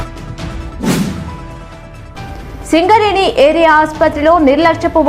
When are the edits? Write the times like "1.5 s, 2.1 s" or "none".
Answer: 1.3 s